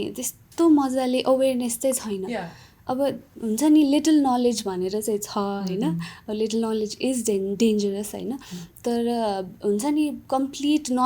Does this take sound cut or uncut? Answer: uncut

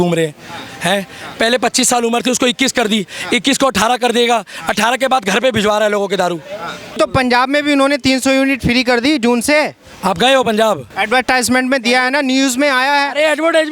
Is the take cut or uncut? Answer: cut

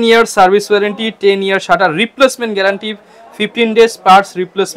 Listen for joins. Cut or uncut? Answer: uncut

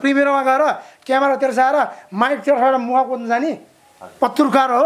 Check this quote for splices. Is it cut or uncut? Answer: uncut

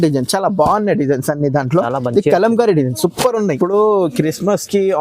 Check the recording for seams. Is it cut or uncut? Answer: cut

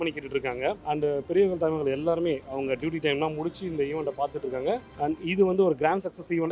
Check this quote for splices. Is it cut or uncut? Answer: uncut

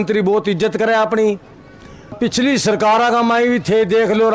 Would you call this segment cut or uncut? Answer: cut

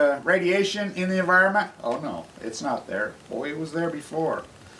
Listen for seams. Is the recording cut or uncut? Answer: uncut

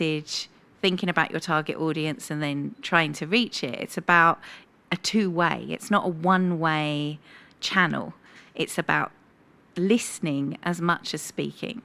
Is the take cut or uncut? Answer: uncut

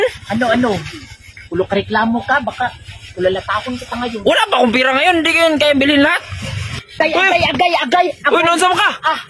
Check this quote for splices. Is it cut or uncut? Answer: cut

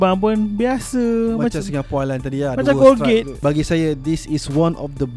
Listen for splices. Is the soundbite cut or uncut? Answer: cut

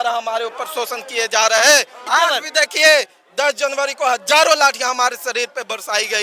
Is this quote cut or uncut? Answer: cut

